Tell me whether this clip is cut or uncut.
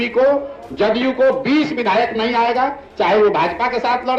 uncut